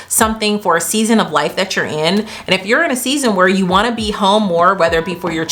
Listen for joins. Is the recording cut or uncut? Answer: uncut